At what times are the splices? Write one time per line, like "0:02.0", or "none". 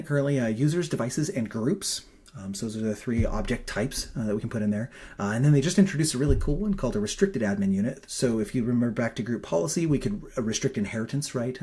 none